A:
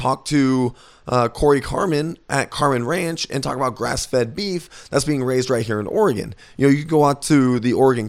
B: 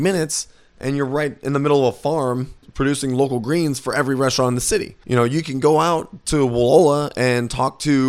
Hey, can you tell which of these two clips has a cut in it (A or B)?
B